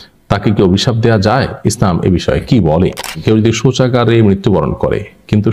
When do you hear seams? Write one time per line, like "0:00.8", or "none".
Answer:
0:03.2